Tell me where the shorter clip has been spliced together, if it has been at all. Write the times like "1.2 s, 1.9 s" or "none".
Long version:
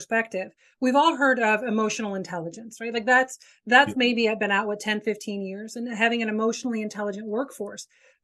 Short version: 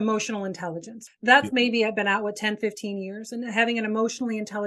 1.0 s